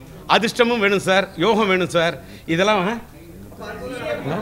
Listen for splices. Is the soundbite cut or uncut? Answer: uncut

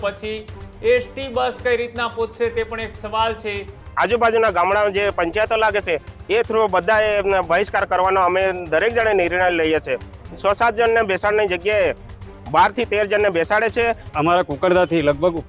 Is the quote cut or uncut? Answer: cut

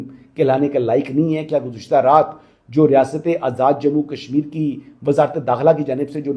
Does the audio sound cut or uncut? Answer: uncut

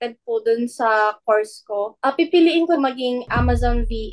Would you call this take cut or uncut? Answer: cut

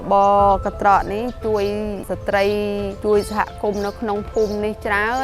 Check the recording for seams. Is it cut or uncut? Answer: cut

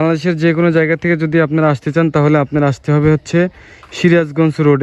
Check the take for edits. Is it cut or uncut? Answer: uncut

